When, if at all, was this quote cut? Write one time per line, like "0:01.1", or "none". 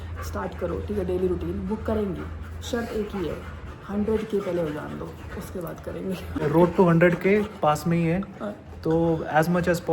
none